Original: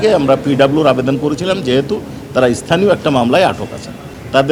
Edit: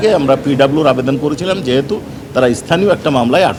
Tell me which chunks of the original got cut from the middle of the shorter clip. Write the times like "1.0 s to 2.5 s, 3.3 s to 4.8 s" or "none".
none